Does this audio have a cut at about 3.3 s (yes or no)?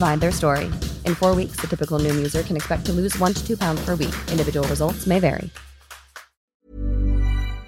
no